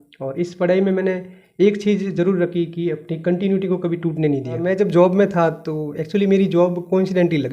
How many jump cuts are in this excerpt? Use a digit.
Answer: 1